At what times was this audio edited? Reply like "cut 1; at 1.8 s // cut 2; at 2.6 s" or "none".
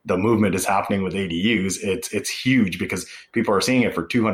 none